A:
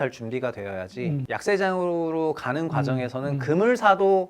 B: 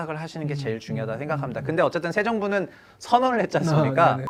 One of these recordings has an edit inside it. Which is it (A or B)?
A